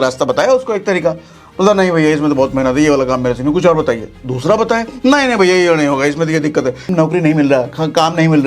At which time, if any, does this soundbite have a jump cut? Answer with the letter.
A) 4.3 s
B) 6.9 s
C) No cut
B